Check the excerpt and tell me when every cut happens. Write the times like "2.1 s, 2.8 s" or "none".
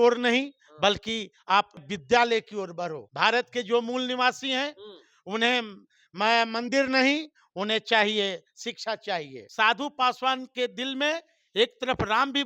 1.9 s, 3.0 s, 9.4 s